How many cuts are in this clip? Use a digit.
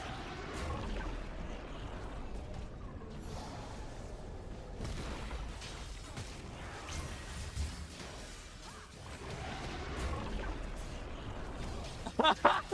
3